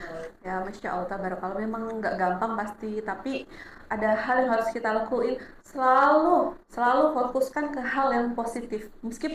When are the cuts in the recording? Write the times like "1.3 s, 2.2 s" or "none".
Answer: none